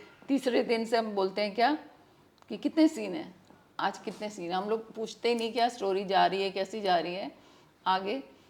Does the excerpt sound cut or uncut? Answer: uncut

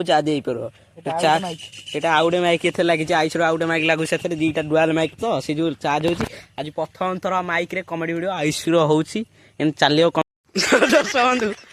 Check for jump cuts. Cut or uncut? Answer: cut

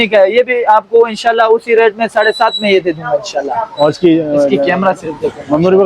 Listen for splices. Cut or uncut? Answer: uncut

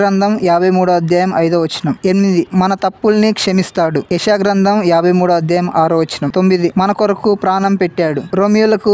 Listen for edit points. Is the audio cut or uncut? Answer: cut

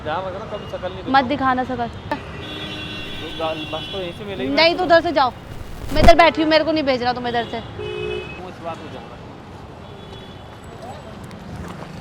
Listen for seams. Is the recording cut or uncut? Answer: cut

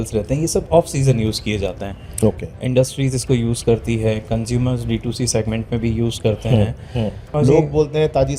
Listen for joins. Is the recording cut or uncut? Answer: cut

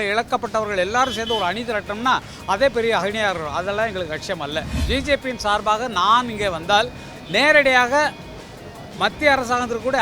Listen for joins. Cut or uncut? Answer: cut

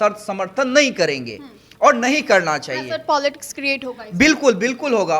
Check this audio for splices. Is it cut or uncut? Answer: uncut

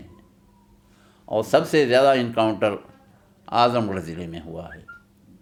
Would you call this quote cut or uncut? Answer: uncut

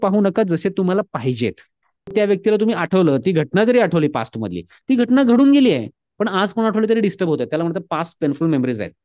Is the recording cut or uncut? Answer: cut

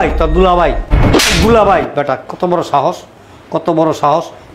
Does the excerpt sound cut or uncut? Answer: uncut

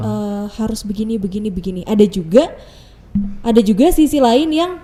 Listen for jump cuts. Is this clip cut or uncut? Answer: uncut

